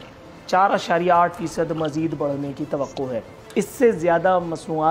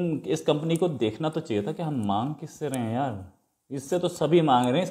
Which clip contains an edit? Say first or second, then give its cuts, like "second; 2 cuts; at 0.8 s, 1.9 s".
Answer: first; 1 cut; at 3.4 s